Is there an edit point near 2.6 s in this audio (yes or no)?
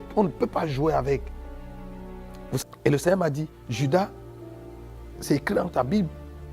yes